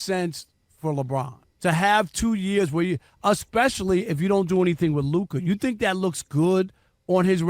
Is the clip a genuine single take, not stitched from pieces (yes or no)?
no